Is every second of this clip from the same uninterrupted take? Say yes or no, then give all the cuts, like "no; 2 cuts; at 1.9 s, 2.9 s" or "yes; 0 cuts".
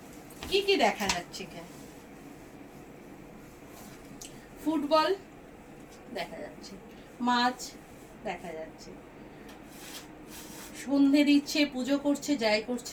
yes; 0 cuts